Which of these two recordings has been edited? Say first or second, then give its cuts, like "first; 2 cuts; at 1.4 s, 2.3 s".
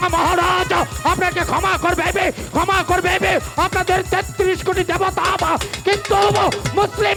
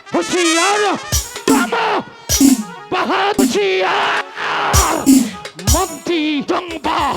second; 2 cuts; at 3.4 s, 6.4 s